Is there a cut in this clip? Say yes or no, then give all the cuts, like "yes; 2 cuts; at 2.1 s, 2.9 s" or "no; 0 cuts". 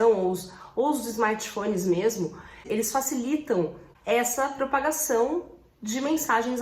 yes; 2 cuts; at 2.6 s, 3.8 s